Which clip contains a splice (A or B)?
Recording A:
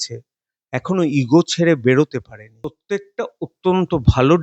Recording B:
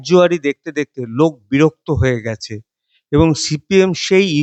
A